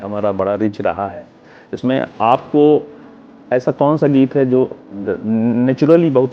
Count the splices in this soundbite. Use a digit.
0